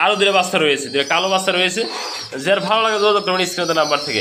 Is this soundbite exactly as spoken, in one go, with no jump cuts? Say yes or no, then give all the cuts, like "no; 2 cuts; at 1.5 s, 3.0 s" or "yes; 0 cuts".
yes; 0 cuts